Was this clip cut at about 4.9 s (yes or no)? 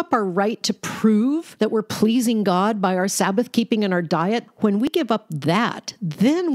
yes